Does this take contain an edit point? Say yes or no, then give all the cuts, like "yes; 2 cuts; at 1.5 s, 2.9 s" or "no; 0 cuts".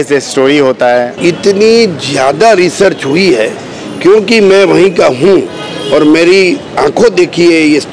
yes; 1 cut; at 1.1 s